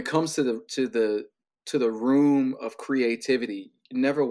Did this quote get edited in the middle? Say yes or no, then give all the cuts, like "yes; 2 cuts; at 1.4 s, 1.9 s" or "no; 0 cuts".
no; 0 cuts